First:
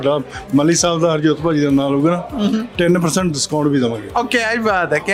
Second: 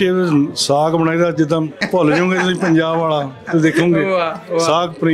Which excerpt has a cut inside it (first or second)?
second